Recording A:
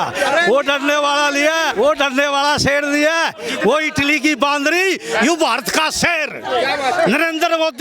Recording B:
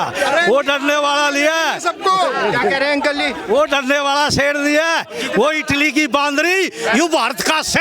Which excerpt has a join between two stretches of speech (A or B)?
A